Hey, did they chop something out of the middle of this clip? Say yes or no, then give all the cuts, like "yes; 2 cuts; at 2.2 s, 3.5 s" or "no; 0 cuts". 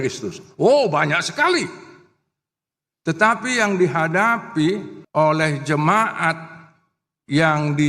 yes; 1 cut; at 5.0 s